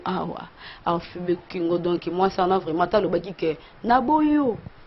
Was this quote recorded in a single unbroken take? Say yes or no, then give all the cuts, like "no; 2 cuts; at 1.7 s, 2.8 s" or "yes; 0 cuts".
yes; 0 cuts